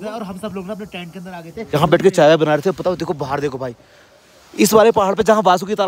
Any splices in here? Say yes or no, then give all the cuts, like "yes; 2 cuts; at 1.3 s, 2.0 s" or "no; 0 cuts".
no; 0 cuts